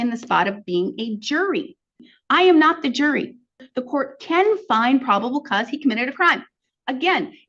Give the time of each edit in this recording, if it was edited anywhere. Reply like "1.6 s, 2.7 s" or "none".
2.0 s, 3.6 s